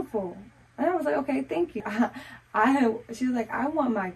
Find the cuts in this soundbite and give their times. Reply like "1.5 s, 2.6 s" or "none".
1.8 s